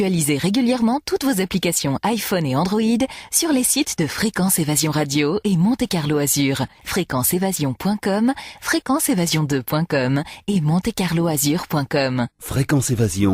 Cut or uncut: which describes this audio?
uncut